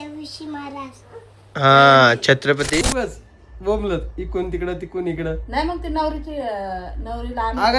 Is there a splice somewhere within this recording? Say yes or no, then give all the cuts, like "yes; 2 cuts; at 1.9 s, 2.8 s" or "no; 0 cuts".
yes; 1 cut; at 2.8 s